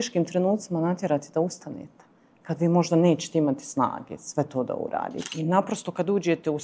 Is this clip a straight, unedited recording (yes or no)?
no